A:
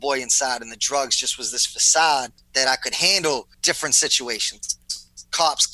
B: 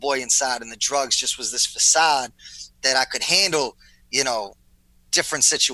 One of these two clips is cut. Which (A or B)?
A